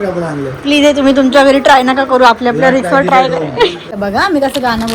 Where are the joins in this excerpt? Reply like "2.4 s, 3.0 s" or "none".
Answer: 3.8 s